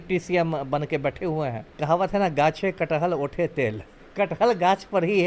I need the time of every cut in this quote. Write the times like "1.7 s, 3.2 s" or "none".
1.7 s, 4.0 s